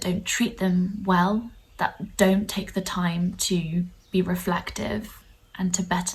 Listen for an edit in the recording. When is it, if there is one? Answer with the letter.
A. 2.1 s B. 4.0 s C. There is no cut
B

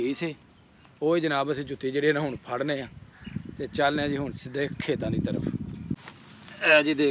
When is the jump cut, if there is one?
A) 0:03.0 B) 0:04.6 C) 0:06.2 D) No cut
C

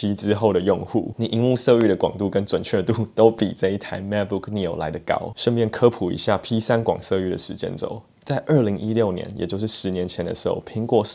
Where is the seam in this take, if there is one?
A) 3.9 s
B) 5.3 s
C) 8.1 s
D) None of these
D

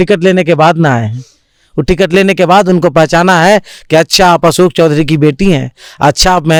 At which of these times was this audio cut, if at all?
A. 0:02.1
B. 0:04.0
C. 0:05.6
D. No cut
D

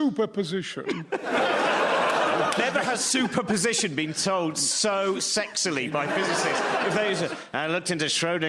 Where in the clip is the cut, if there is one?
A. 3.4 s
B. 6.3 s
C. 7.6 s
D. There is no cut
B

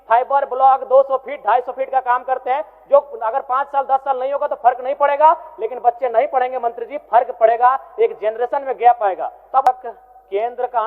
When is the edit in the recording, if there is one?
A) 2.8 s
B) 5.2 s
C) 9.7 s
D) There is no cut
C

